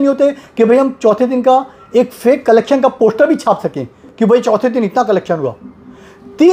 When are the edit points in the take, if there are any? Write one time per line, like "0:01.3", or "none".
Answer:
none